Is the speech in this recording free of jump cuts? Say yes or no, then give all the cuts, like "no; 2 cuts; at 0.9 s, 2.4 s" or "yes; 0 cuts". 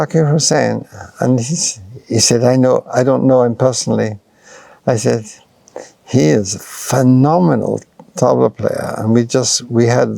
yes; 0 cuts